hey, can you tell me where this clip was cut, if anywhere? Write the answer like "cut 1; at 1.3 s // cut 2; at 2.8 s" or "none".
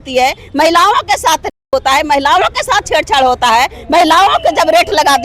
none